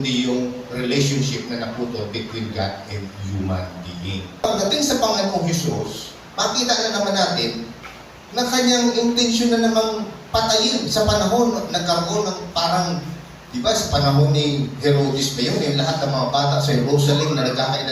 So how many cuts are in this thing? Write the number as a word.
one